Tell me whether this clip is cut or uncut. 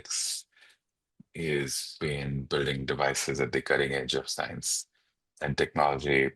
cut